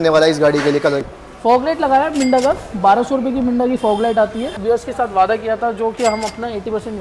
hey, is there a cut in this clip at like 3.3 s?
no; 2 cuts; at 1.1 s, 4.5 s

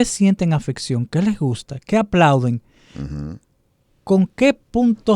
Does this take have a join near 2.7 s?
no; 0 cuts

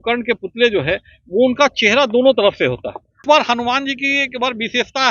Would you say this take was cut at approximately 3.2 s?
yes; 1 cut; at 3.2 s

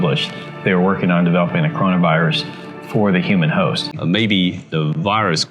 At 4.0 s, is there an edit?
yes; 1 cut; at 4.0 s

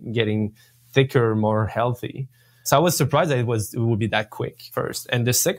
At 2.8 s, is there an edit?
no; 0 cuts

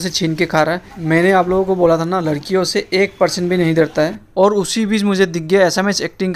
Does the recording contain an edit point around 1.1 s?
no; 0 cuts

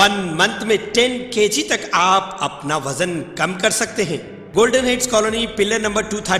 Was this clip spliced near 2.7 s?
no; 1 cut; at 4.3 s

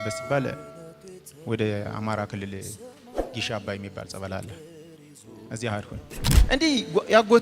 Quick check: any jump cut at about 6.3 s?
yes; 1 cut; at 6.3 s

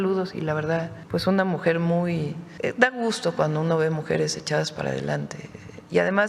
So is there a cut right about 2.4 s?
yes; 2 cuts; at 1.0 s, 2.4 s

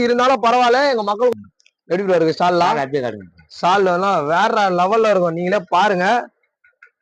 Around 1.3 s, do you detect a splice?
yes; 1 cut; at 1.3 s

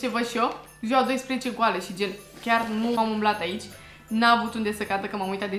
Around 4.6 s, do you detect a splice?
no; 1 cut; at 3.0 s

